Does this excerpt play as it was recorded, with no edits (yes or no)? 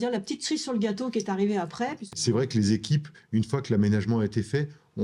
no